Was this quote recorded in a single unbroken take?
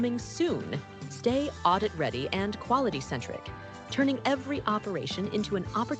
no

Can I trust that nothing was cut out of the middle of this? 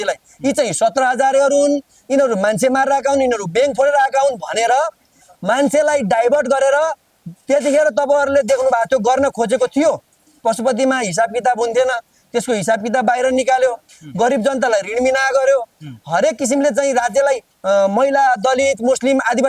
yes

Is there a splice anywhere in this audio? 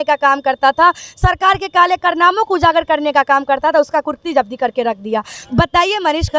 yes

